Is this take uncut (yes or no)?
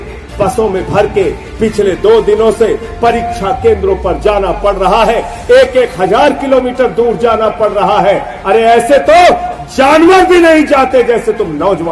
yes